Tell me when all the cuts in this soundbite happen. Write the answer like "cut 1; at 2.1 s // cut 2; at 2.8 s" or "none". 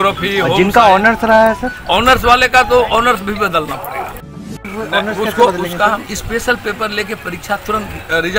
cut 1; at 4.5 s